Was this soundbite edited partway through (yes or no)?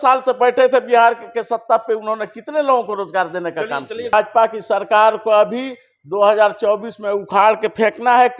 yes